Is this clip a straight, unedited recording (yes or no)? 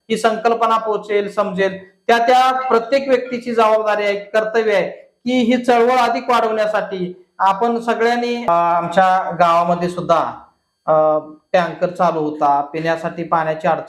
no